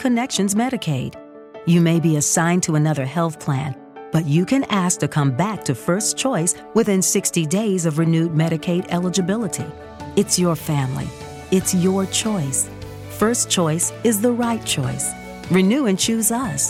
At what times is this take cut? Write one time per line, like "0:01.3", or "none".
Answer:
none